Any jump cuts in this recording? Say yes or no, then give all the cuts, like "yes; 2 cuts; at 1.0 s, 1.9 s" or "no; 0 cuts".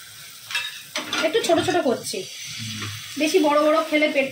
no; 0 cuts